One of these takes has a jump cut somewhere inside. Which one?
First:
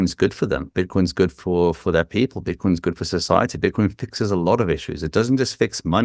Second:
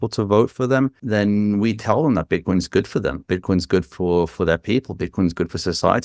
second; 1 cut; at 1.0 s

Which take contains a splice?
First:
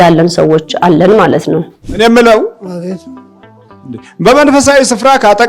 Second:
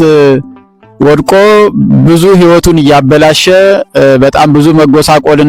first; 1 cut; at 1.8 s

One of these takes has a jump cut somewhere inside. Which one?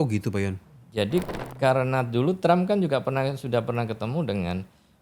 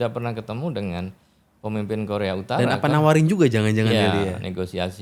first; 1 cut; at 1.4 s

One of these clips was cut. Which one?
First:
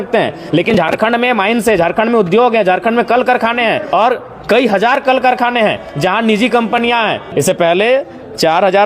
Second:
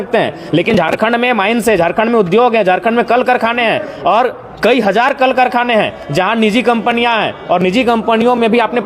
first; 2 cuts; at 3.8 s, 7.2 s

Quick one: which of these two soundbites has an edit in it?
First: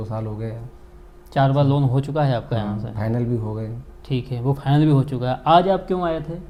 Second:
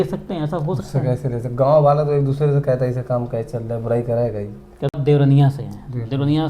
second; 1 cut; at 5.0 s

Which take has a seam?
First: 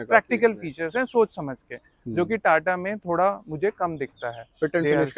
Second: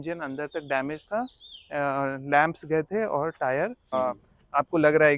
second; 1 cut; at 3.9 s

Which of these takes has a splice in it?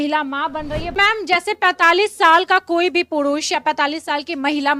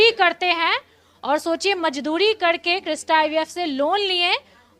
first; 1 cut; at 1.0 s

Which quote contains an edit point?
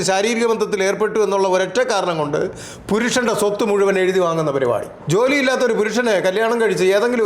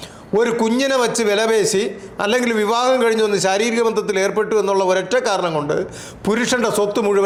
first; 1 cut; at 4.9 s

